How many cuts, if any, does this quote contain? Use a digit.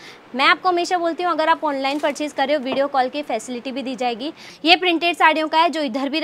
1